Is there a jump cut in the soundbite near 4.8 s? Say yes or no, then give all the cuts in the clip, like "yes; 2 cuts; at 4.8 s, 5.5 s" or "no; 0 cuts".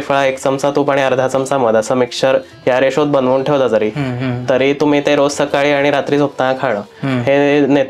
no; 0 cuts